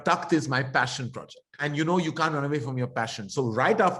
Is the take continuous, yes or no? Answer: no